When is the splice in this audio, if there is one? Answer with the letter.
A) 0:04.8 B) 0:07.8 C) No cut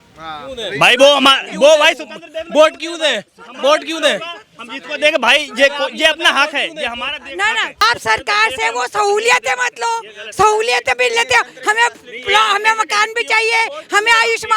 B